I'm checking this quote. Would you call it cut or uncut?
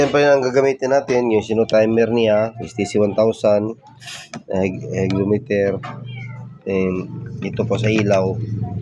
uncut